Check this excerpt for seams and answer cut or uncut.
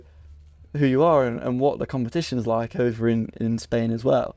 uncut